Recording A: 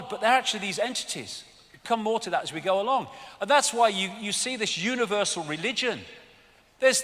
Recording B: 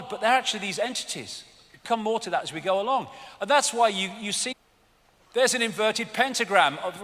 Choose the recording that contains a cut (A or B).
A